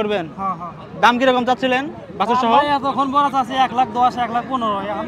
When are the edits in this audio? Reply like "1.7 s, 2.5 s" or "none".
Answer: none